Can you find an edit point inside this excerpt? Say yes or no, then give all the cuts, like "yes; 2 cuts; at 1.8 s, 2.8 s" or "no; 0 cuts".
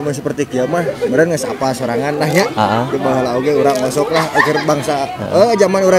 no; 0 cuts